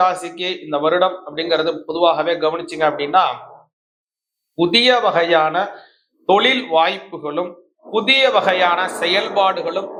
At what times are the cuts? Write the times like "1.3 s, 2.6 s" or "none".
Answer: none